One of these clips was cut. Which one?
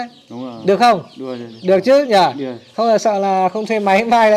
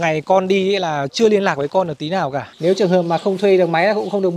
second; 1 cut; at 2.5 s

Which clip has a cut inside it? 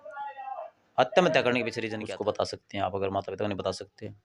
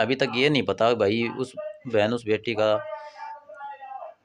first; 1 cut; at 1.8 s

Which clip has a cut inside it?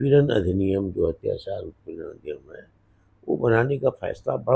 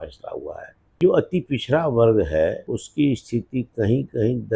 second; 2 cuts; at 1.0 s, 2.6 s

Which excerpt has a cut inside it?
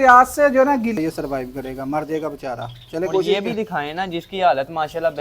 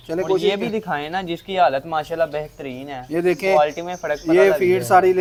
first; 1 cut; at 0.9 s

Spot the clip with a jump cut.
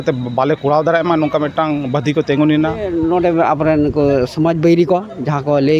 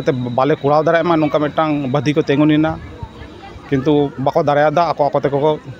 first; 1 cut; at 2.9 s

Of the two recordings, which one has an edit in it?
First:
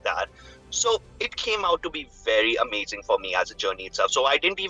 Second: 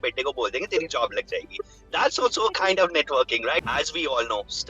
second; 1 cut; at 3.6 s

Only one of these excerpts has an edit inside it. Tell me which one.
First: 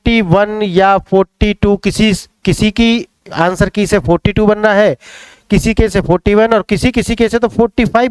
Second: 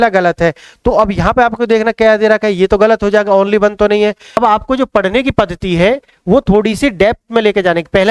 second; 1 cut; at 4.4 s

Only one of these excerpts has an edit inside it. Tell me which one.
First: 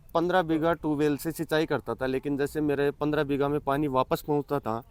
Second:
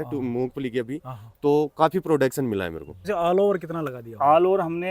second; 1 cut; at 3.1 s

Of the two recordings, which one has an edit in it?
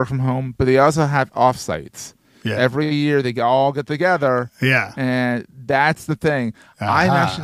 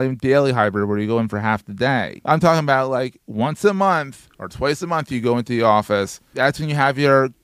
second; 2 cuts; at 2.1 s, 6.2 s

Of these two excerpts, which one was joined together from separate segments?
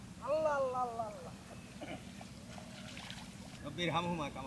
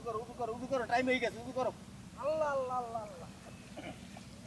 first; 1 cut; at 3.6 s

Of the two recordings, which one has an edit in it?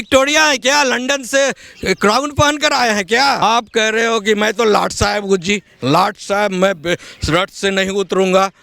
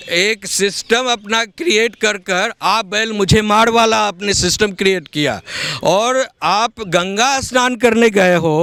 first; 1 cut; at 3.4 s

